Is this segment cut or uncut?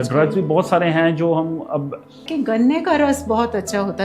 cut